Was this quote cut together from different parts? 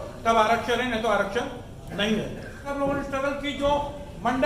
yes; 1 cut; at 2.7 s

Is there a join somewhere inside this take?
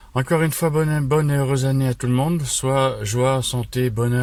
no; 0 cuts

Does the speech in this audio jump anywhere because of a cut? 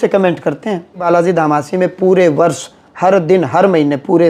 yes; 1 cut; at 1.0 s

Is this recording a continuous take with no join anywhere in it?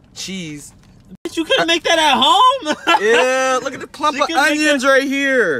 yes; 0 cuts

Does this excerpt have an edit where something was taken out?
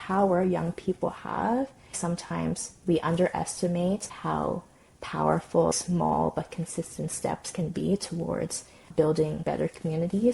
yes; 2 cuts; at 2.0 s, 9.4 s

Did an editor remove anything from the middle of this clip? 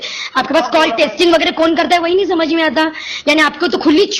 no; 0 cuts

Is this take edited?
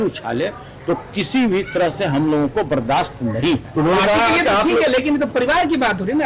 no; 0 cuts

